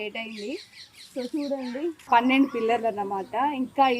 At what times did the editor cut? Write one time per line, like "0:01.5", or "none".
0:02.0